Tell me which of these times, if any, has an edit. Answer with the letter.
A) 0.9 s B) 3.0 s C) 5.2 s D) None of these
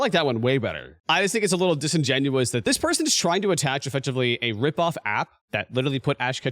A